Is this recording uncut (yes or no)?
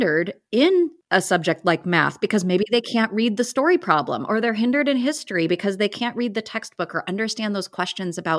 no